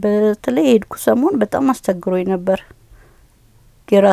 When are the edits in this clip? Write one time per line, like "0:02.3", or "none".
none